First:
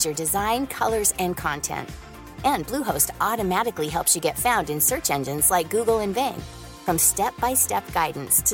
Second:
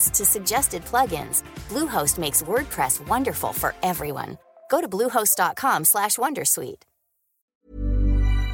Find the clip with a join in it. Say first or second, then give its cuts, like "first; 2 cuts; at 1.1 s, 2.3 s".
second; 1 cut; at 7.6 s